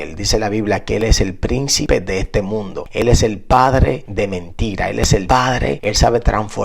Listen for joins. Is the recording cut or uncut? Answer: cut